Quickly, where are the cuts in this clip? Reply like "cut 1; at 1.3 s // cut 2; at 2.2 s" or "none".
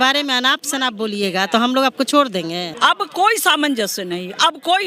cut 1; at 2.7 s